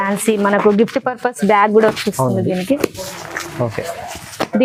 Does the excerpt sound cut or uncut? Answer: uncut